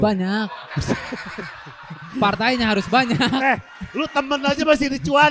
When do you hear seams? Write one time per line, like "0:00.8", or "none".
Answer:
none